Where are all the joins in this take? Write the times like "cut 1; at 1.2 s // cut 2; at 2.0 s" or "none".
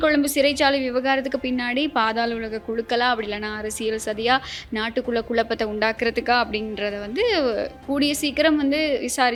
none